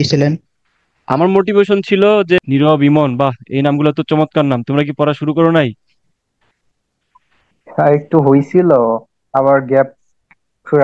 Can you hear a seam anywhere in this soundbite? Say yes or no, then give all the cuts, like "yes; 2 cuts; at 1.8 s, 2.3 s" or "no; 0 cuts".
yes; 1 cut; at 2.4 s